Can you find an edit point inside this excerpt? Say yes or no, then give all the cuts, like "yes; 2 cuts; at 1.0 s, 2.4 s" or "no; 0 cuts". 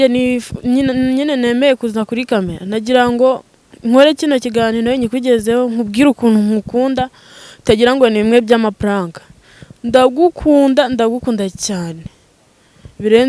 no; 0 cuts